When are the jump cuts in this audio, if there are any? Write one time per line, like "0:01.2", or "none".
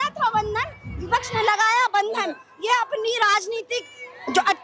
none